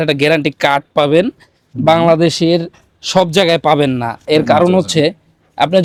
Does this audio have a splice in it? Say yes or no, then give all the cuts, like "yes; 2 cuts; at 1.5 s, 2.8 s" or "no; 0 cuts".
no; 0 cuts